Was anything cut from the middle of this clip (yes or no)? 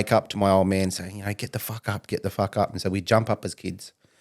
no